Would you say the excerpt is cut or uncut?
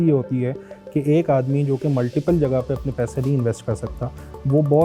uncut